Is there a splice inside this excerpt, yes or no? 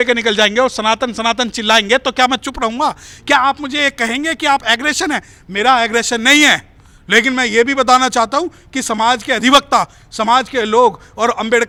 no